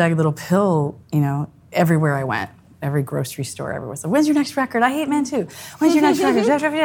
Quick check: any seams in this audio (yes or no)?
yes